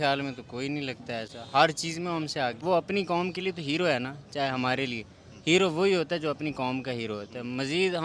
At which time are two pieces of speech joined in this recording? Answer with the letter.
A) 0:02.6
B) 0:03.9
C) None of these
A